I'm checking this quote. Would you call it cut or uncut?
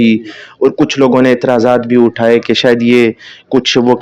uncut